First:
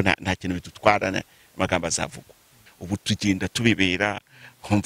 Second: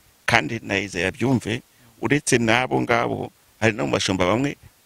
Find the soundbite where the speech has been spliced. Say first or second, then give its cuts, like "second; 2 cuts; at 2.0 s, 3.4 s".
first; 1 cut; at 2.5 s